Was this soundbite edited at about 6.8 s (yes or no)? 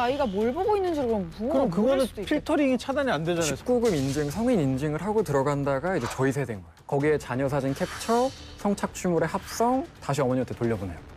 yes